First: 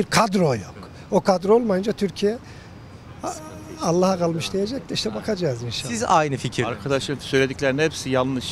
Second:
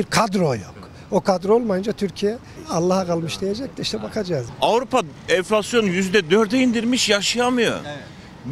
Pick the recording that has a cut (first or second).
second